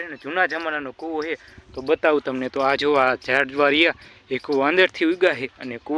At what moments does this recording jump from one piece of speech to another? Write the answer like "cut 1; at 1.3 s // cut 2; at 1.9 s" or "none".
none